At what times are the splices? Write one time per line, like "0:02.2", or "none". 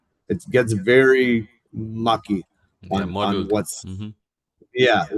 none